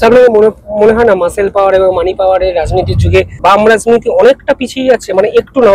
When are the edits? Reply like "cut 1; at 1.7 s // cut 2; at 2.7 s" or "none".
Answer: cut 1; at 3.3 s